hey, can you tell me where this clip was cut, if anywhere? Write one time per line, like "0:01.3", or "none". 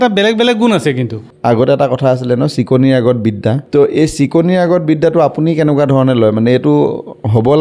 0:01.2
0:03.6